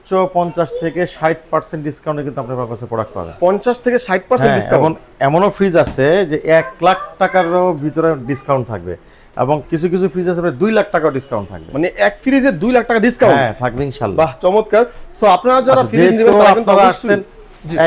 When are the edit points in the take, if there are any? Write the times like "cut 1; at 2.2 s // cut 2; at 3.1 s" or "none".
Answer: none